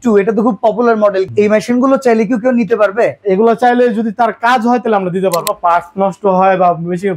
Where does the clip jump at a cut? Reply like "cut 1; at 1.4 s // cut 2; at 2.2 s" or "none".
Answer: cut 1; at 1.3 s // cut 2; at 5.4 s